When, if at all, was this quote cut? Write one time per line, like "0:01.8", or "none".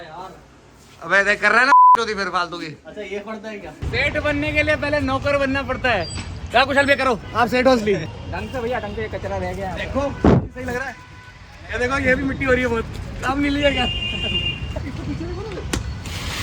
0:03.8
0:08.1
0:14.8